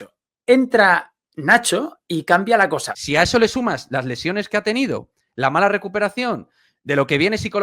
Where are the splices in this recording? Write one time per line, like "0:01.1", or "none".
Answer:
0:02.9